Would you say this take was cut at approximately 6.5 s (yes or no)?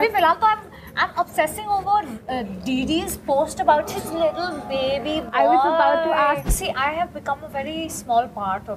yes